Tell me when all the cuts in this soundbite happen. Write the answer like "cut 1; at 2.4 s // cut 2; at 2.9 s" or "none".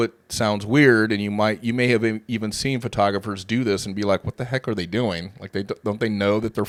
none